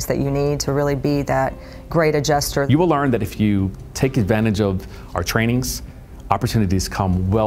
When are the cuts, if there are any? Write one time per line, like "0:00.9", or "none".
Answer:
0:02.7